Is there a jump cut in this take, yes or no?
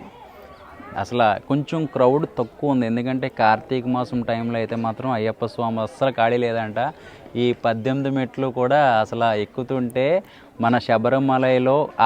no